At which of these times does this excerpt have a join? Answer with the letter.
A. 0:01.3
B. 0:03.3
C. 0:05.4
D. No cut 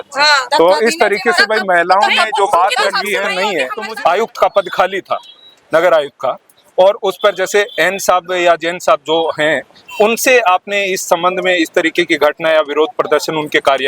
B